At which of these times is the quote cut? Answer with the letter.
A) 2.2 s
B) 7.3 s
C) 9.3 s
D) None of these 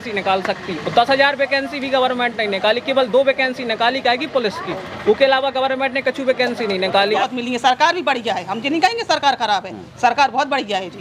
B